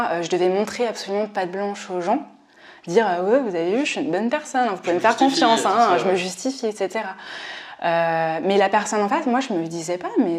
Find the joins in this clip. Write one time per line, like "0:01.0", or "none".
none